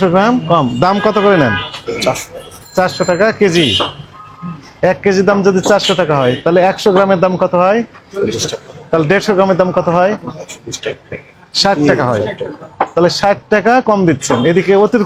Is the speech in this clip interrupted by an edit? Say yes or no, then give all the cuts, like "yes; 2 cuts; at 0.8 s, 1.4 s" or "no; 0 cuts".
no; 0 cuts